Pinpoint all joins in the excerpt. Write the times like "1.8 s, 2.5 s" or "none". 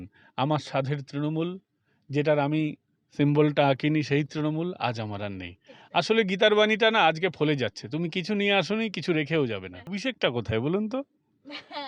9.8 s